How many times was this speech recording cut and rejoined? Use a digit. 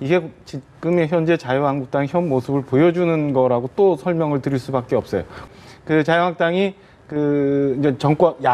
1